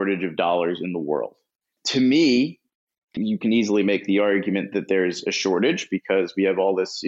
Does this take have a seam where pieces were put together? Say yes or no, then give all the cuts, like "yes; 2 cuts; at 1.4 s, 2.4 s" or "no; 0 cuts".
yes; 2 cuts; at 1.7 s, 3.2 s